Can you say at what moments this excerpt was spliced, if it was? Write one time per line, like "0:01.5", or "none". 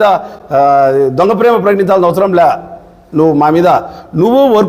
none